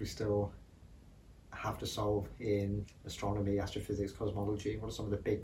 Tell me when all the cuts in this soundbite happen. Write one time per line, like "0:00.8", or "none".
none